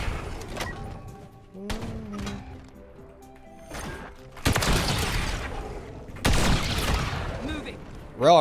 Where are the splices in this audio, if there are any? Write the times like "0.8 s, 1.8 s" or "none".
none